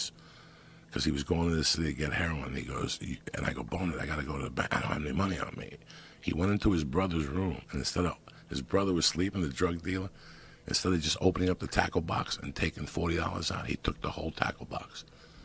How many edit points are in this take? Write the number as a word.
one